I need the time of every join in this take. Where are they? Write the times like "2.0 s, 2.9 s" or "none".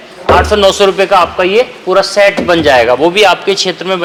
none

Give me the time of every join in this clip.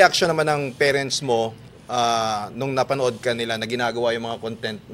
none

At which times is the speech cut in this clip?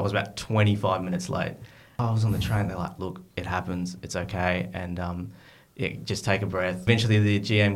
1.9 s, 6.8 s

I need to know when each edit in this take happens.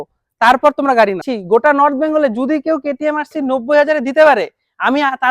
1.3 s

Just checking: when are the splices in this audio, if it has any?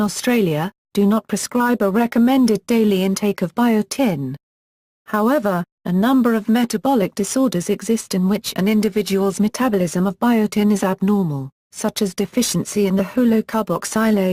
5.8 s

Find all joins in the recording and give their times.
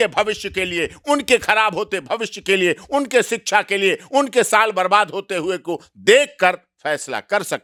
none

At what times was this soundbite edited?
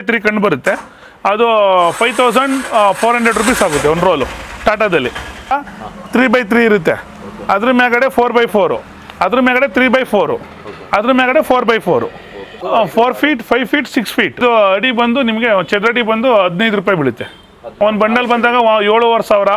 5.5 s, 12.6 s, 14.4 s, 17.6 s

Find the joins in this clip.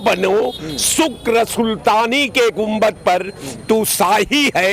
none

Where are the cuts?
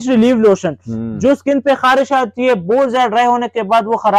none

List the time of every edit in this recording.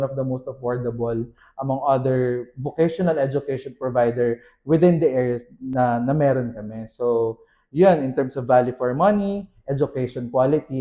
none

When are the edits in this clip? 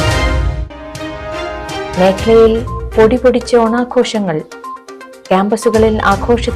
1.3 s

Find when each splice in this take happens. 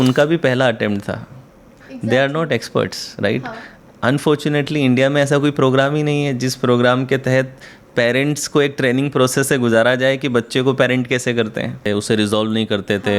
11.9 s

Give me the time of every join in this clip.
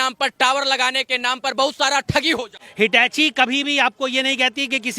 2.6 s

